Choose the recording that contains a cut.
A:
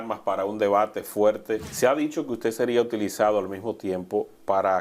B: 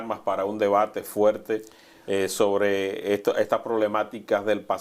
A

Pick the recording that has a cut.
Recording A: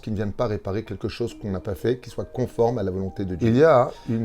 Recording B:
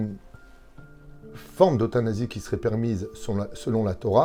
A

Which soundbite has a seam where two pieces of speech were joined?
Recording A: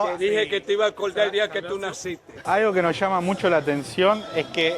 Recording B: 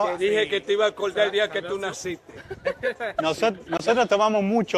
A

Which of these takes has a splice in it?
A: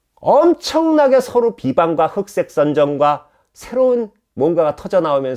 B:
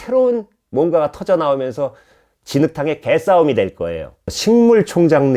B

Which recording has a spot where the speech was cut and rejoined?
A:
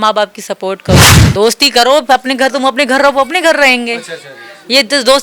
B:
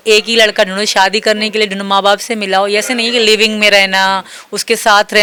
A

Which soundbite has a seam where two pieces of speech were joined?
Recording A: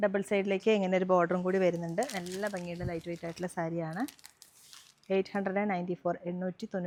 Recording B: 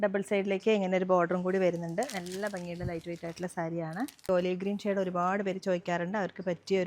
B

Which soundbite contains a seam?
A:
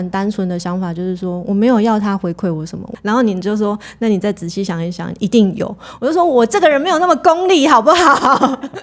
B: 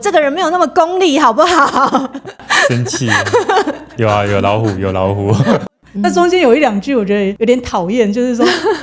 B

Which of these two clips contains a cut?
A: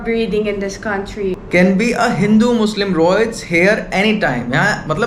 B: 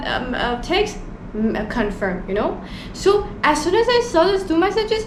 A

